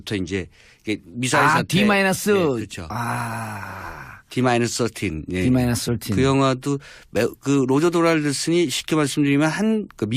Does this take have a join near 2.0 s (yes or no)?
yes